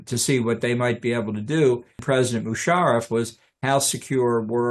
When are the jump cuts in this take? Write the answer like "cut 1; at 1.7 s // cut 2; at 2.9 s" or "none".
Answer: cut 1; at 2.0 s